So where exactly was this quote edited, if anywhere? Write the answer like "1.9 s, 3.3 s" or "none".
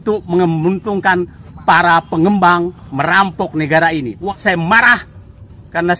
4.4 s